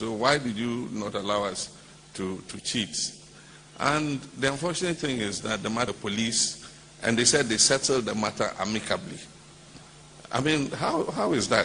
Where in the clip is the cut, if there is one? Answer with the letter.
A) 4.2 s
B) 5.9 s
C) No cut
B